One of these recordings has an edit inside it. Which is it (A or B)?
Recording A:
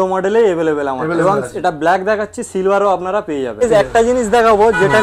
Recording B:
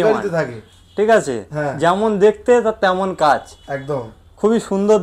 A